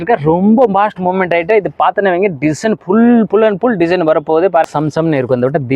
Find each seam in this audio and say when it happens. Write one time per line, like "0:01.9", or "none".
0:04.7